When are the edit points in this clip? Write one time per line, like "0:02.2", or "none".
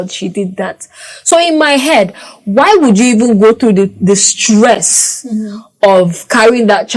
none

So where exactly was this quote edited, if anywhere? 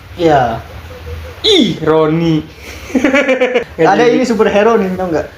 0:03.6

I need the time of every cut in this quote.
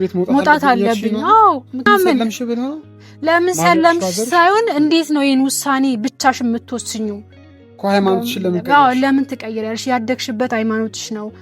0:01.9

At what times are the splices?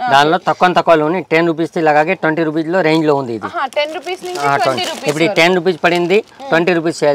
none

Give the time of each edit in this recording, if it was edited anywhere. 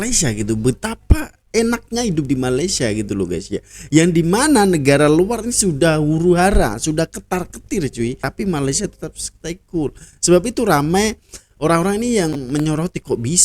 0:08.2

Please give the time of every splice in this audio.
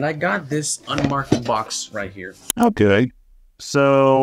0:02.4

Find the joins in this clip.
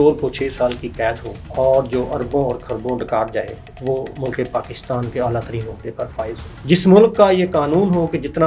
0:01.3
0:03.6
0:06.5

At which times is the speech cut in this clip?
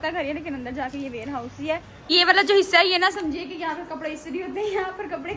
0:02.1

